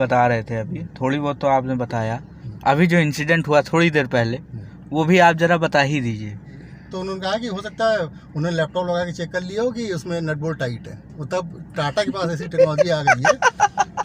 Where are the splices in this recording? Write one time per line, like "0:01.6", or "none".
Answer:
0:06.4